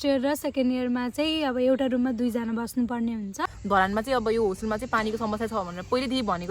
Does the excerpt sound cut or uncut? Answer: cut